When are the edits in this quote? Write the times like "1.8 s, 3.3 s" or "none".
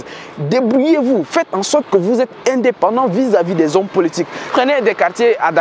4.5 s